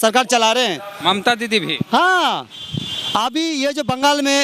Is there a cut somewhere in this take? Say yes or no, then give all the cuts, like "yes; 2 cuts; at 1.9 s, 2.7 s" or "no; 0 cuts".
no; 0 cuts